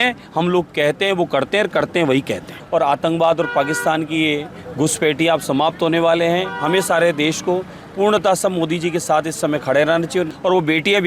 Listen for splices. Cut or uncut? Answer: cut